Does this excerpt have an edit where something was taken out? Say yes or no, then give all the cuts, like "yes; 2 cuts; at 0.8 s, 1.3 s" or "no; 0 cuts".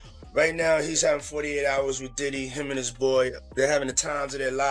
yes; 1 cut; at 3.4 s